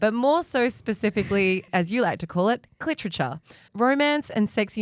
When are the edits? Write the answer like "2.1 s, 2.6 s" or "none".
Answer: none